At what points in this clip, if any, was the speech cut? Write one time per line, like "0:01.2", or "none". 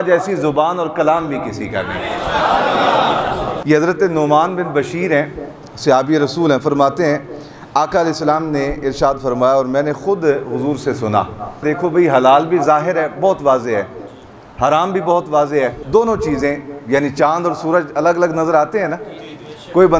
none